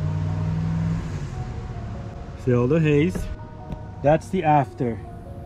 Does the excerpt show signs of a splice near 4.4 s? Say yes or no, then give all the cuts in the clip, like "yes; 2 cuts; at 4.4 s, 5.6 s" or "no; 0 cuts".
no; 1 cut; at 2.1 s